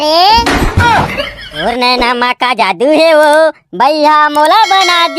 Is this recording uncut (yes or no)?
no